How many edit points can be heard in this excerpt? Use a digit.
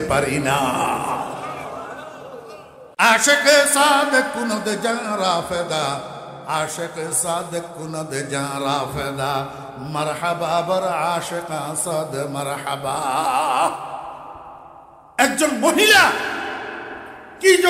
1